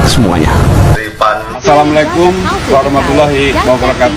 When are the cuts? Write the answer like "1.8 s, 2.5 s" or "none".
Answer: 1.6 s